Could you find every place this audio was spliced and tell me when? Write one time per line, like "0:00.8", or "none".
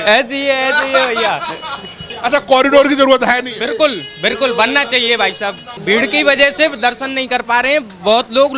0:02.1
0:05.8